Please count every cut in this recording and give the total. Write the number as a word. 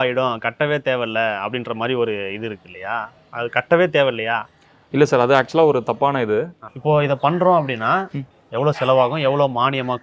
one